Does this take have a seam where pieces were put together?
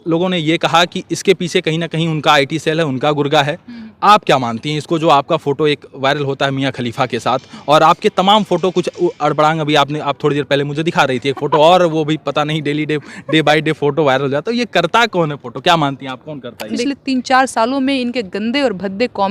yes; 1 cut; at 16.8 s

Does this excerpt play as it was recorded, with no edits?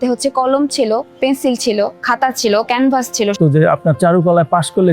no; 1 cut; at 3.3 s

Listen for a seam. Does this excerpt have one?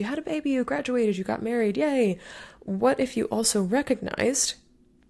no; 0 cuts

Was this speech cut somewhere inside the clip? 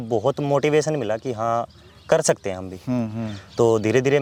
no; 0 cuts

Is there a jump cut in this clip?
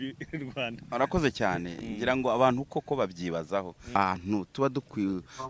yes; 1 cut; at 4.0 s

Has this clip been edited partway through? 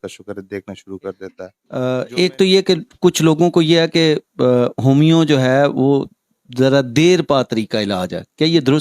yes; 1 cut; at 1.3 s

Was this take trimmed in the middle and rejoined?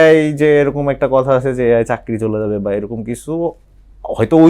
no; 0 cuts

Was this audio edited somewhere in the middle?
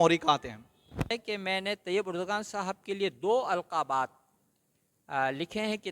yes; 1 cut; at 1.1 s

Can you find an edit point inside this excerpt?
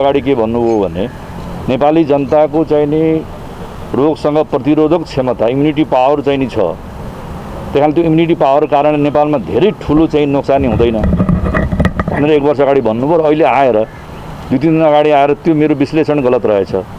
no; 0 cuts

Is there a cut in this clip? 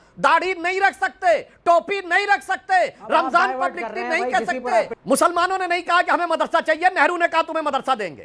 yes; 1 cut; at 4.9 s

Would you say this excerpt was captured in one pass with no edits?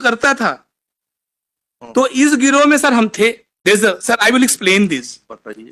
no; 1 cut; at 3.5 s

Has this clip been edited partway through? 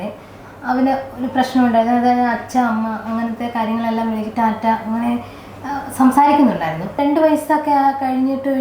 yes; 1 cut; at 7.0 s

